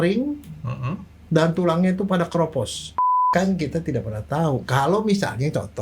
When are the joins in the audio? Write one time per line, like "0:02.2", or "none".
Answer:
0:03.3